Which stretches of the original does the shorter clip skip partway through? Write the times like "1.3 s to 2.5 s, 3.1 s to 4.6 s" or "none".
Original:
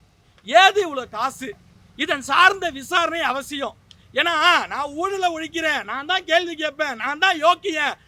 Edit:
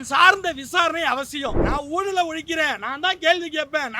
3.8 s to 4.7 s